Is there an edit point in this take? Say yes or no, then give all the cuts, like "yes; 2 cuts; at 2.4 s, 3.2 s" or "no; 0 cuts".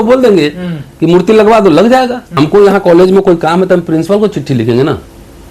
yes; 1 cut; at 2.2 s